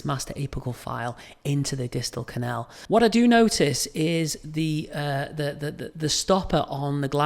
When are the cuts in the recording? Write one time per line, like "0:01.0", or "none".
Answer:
0:02.8